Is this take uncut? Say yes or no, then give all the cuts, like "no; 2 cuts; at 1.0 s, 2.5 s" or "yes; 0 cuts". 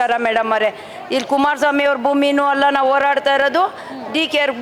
yes; 0 cuts